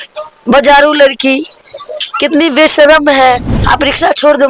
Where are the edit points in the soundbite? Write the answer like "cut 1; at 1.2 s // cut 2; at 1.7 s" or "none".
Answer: cut 1; at 3.5 s